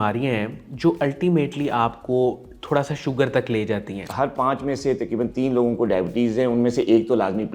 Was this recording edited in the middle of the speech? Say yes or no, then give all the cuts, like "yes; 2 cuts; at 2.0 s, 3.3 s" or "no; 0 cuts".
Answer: yes; 1 cut; at 4.0 s